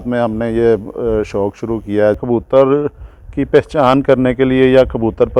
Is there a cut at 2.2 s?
yes; 1 cut; at 2.2 s

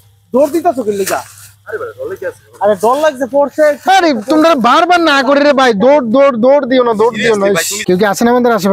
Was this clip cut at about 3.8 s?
no; 1 cut; at 7.7 s

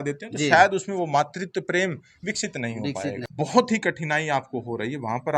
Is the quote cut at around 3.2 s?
yes; 1 cut; at 3.2 s

